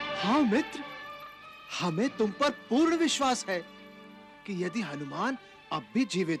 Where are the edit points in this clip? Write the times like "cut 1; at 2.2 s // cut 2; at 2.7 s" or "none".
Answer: none